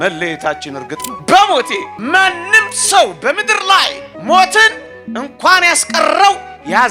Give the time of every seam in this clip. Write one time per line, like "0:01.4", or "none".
0:01.1